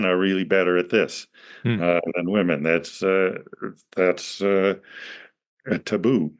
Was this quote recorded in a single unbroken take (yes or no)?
yes